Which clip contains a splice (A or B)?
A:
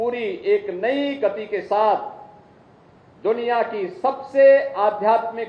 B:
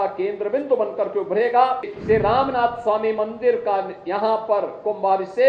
B